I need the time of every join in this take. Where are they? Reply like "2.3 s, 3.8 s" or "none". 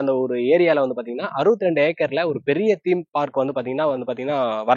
none